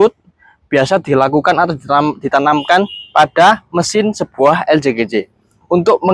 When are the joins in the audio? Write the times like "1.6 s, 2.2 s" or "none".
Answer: none